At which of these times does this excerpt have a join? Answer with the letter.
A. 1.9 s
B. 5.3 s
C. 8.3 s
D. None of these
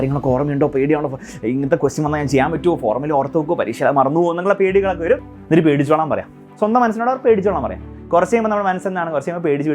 B